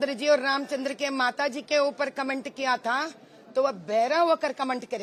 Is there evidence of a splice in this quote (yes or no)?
no